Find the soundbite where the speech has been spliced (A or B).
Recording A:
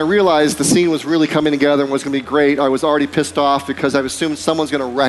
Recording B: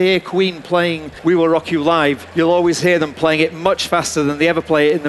B